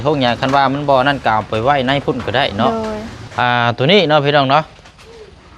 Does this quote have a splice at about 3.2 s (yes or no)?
yes